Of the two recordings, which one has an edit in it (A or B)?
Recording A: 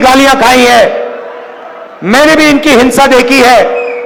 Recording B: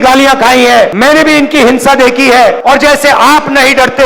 B